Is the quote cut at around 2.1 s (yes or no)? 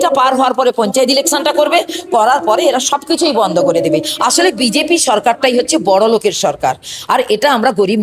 no